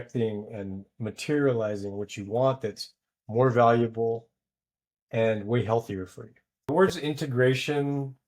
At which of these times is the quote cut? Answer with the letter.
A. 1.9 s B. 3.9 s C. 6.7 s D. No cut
C